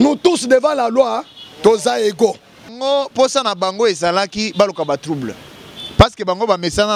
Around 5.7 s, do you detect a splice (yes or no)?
no